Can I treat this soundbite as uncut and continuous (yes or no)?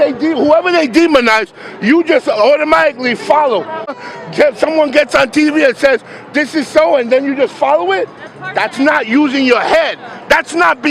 no